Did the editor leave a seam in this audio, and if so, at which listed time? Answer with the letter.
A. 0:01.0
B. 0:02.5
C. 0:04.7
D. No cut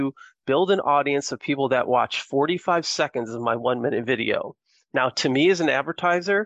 D